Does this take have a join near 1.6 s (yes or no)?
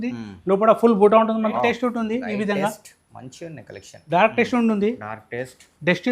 yes